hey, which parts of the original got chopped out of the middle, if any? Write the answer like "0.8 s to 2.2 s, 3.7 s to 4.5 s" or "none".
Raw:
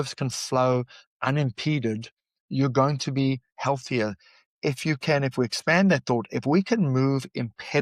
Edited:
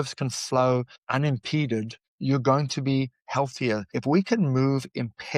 1.0 s to 1.1 s, 2.2 s to 2.3 s, 4.2 s to 6.3 s